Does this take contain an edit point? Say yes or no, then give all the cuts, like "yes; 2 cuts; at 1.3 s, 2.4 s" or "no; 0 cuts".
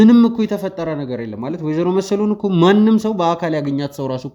no; 0 cuts